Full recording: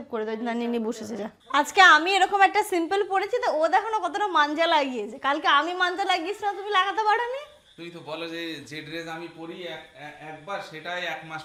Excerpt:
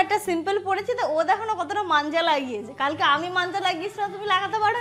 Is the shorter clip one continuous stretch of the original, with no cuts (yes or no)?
yes